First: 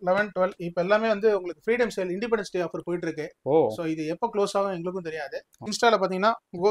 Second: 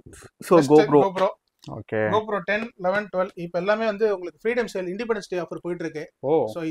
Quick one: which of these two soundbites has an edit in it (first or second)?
first